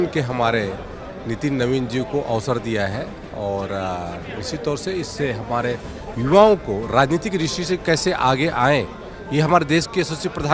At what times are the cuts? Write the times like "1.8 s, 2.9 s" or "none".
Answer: none